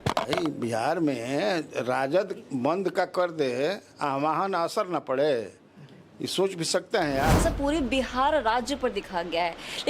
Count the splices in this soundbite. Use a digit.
1